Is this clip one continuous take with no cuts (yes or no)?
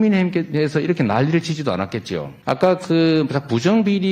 no